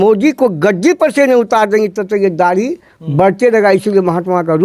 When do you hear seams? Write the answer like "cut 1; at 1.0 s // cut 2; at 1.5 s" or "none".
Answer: none